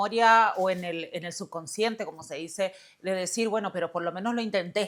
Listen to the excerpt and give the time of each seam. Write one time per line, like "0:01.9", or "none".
none